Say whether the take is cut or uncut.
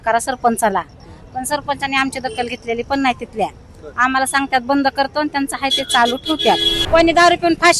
cut